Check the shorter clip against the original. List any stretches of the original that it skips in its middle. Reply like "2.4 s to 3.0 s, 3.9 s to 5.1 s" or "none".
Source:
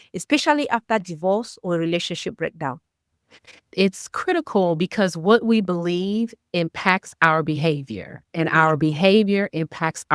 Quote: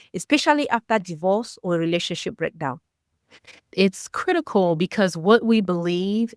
none